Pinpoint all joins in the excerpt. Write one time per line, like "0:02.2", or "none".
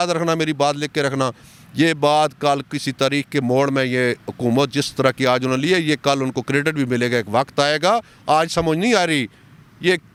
none